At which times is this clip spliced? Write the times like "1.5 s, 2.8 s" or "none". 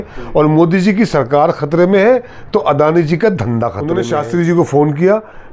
3.9 s